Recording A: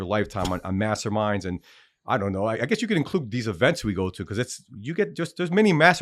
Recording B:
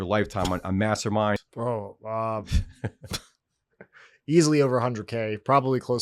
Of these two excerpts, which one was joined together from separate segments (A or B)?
B